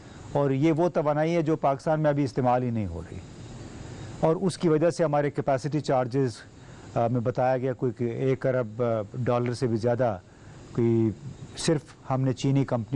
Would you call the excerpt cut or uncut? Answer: uncut